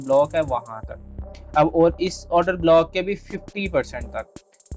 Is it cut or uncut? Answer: uncut